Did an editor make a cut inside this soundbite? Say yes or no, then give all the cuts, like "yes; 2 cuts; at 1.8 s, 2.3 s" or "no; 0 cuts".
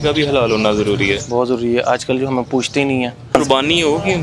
yes; 1 cut; at 3.3 s